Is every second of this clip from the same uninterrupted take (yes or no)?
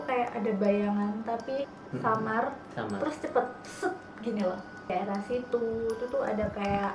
no